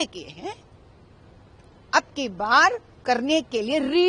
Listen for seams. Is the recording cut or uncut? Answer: uncut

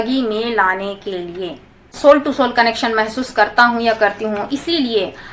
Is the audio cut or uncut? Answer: cut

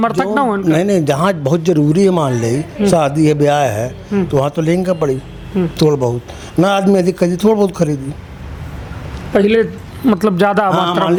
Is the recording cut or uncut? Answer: uncut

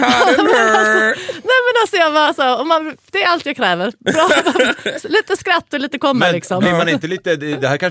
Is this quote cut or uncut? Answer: uncut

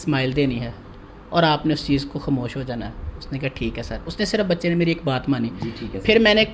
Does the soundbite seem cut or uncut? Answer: uncut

